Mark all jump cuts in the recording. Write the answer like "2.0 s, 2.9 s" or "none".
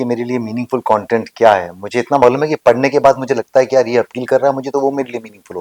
none